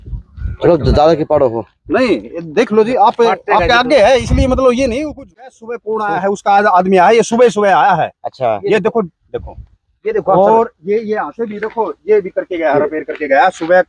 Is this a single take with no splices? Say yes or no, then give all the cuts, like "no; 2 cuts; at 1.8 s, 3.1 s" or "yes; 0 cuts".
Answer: no; 1 cut; at 5.2 s